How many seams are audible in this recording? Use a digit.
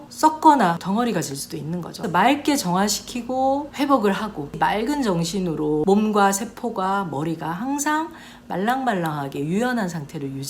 4